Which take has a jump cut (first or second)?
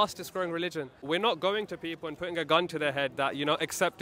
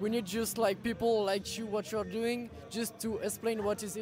first